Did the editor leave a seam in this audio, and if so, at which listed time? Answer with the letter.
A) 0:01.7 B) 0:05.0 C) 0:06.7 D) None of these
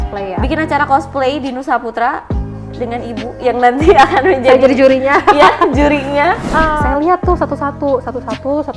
C